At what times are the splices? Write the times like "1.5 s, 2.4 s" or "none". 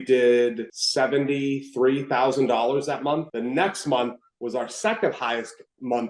none